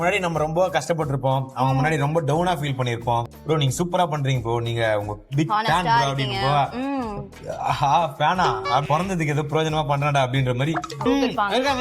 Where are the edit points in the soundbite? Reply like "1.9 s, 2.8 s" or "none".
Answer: 3.3 s, 8.8 s, 11.0 s